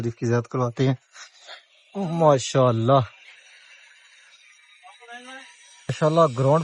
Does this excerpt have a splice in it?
no; 0 cuts

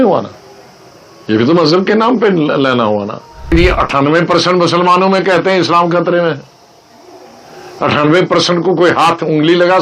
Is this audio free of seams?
no; 1 cut; at 3.5 s

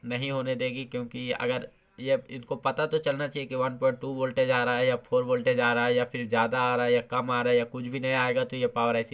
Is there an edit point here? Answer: no; 0 cuts

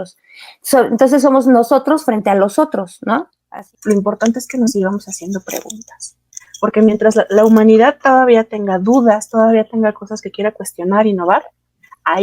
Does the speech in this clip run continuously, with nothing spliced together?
no; 1 cut; at 3.4 s

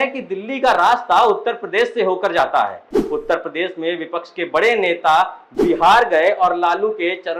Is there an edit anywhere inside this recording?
no; 0 cuts

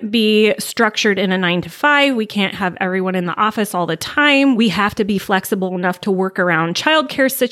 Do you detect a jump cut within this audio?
yes; 1 cut; at 4.6 s

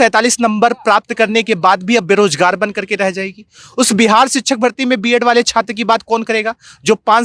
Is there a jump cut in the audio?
no; 0 cuts

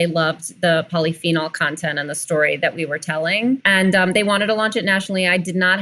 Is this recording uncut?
no; 1 cut; at 3.6 s

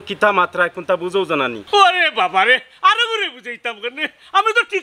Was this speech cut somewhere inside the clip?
yes; 1 cut; at 1.6 s

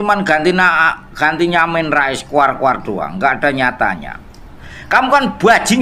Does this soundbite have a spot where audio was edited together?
yes; 1 cut; at 4.9 s

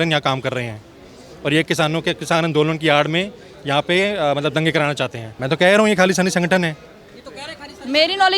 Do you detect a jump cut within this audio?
yes; 1 cut; at 5.3 s

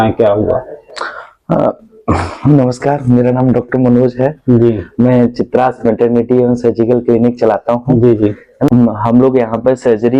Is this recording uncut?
yes; 0 cuts

